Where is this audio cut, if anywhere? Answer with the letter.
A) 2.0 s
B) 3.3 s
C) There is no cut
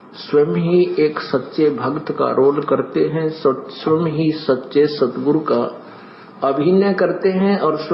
A